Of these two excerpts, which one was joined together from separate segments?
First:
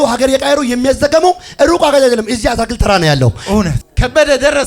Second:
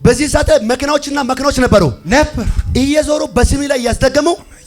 first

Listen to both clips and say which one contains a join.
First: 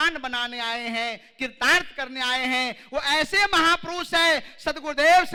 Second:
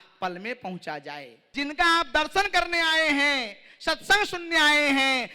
second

